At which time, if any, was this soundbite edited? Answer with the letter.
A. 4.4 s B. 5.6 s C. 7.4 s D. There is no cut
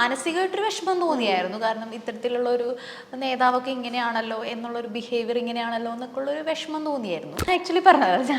C